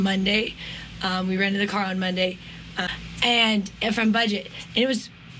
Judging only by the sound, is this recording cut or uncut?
cut